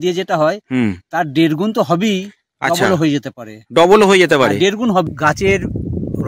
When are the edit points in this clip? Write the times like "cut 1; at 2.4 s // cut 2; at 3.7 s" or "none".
cut 1; at 5.1 s